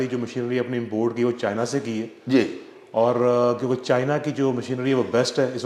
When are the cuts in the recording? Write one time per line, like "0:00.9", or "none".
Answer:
none